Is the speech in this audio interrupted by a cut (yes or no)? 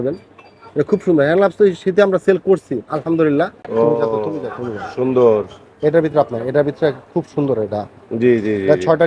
yes